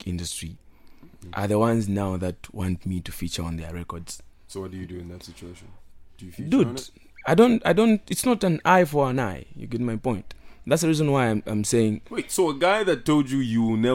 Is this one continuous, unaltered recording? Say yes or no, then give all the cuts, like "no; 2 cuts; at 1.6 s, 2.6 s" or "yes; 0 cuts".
yes; 0 cuts